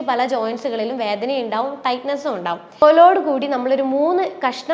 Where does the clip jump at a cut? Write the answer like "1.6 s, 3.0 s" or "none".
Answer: 2.8 s